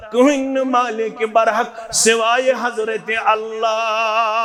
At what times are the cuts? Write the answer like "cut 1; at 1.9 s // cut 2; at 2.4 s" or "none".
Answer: none